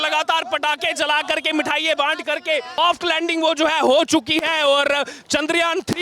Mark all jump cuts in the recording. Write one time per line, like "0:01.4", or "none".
0:02.8